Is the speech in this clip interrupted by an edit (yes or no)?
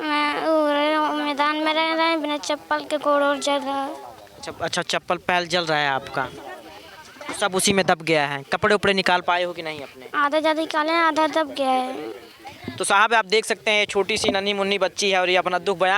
no